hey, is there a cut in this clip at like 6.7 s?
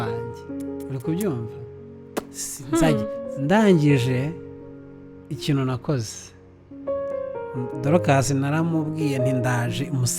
no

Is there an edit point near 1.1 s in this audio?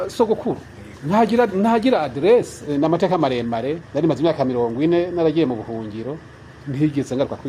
no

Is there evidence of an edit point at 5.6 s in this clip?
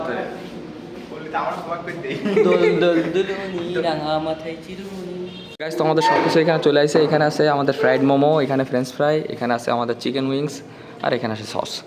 yes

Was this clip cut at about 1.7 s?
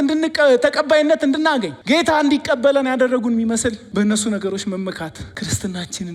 yes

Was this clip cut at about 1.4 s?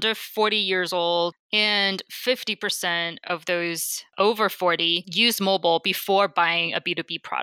yes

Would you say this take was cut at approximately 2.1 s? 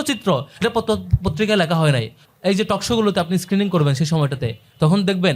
yes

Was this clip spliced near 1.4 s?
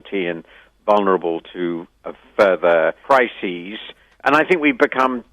no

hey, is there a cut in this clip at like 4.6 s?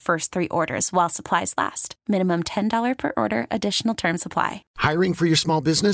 yes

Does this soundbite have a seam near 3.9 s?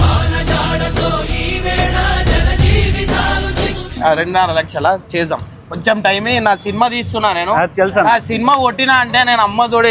yes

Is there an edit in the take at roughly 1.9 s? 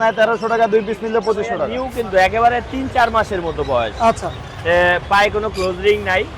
yes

